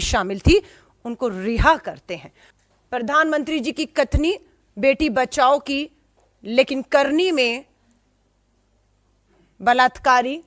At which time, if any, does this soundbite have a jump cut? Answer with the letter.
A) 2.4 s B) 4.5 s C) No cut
A